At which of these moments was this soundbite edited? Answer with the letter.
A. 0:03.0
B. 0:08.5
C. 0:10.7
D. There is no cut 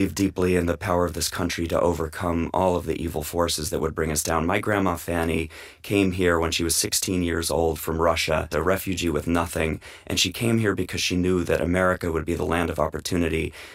B